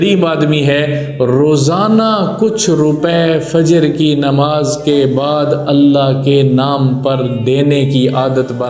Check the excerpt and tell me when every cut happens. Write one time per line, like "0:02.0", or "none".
none